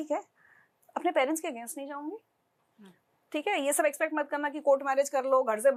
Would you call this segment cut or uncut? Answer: uncut